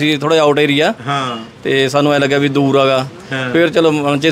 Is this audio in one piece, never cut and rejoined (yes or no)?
yes